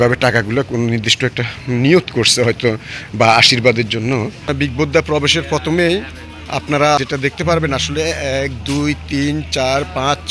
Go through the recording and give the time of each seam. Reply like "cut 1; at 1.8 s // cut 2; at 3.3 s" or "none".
cut 1; at 4.3 s // cut 2; at 7.0 s